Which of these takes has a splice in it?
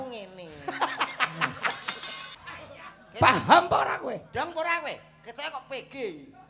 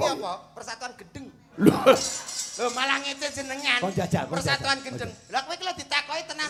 first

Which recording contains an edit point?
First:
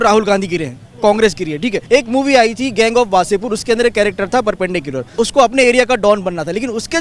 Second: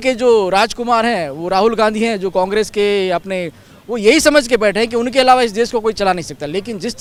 first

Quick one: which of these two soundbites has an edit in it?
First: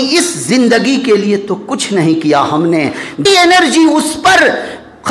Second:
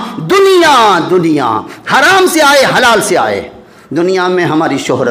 first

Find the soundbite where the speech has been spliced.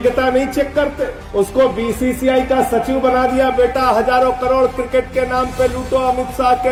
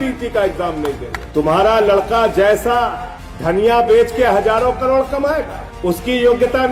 second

